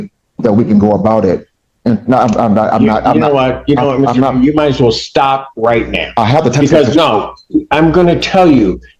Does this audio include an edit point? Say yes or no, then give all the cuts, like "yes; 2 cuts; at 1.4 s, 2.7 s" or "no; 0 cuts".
no; 0 cuts